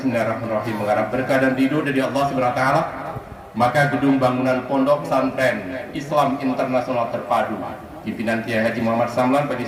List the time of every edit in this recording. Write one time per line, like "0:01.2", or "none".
none